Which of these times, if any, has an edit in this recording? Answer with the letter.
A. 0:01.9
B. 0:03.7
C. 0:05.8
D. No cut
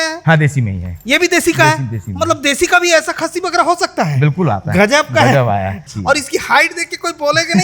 C